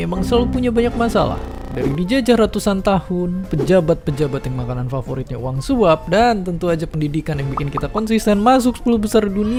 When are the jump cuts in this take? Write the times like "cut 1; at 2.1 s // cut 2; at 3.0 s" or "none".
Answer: none